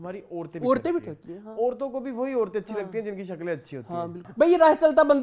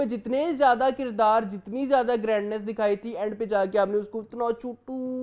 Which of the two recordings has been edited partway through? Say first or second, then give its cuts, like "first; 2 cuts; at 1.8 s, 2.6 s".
first; 1 cut; at 4.2 s